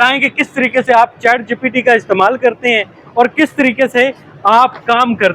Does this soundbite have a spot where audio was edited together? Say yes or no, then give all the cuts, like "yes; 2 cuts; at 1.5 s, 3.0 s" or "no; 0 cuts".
no; 0 cuts